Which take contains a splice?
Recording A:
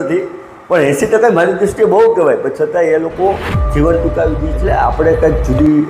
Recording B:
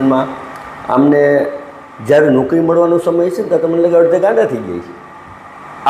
A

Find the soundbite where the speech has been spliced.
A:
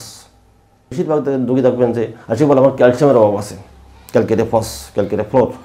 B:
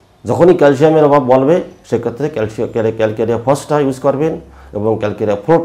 A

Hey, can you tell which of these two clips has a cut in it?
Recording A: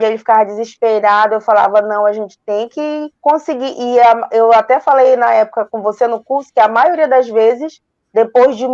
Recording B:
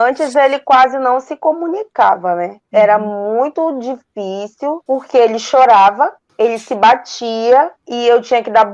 B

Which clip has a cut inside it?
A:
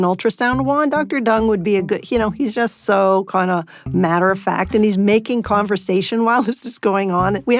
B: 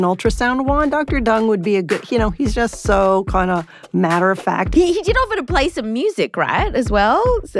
B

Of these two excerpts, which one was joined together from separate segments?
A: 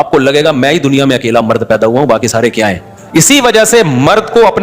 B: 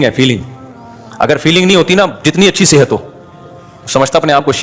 A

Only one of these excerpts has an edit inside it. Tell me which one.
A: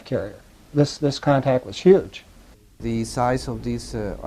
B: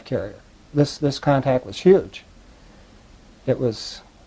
A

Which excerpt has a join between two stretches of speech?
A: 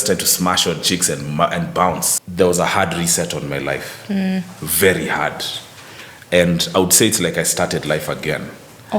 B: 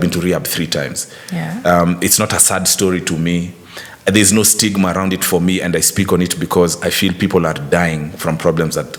A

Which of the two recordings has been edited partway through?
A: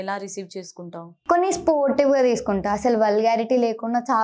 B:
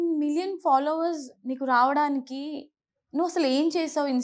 A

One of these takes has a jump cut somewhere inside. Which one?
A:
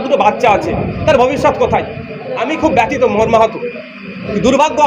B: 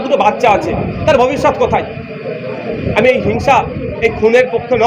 A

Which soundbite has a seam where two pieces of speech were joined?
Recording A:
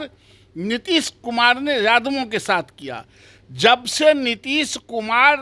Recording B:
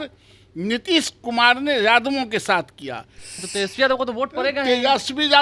B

